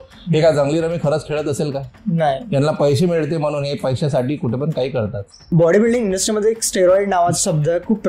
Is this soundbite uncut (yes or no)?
no